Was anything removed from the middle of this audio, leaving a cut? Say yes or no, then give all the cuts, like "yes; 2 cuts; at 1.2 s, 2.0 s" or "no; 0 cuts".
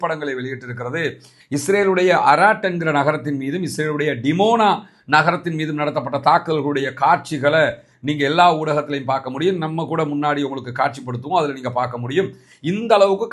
no; 0 cuts